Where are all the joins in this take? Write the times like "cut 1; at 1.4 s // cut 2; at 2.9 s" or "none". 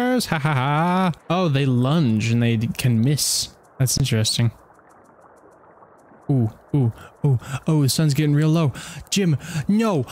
cut 1; at 1.2 s